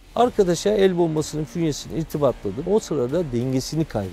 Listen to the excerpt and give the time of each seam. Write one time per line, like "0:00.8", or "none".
0:02.7